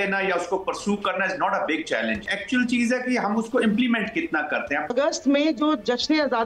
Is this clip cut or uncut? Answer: cut